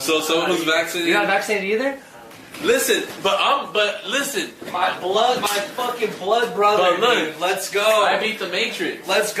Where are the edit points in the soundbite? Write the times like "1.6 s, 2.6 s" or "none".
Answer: 2.1 s